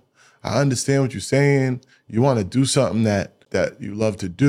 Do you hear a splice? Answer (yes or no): yes